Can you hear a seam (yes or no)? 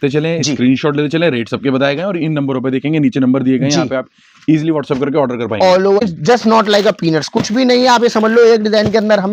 yes